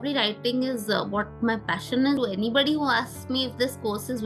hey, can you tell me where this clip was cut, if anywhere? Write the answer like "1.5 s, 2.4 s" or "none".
2.2 s